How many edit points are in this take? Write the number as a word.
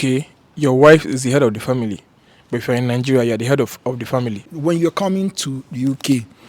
one